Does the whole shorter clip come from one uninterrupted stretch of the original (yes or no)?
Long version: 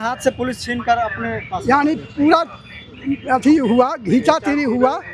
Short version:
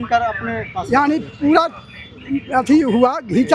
yes